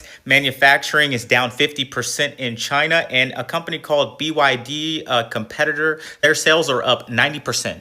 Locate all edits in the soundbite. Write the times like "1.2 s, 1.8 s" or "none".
none